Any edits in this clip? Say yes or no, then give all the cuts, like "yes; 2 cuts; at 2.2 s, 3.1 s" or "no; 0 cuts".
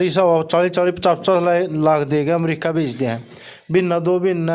no; 0 cuts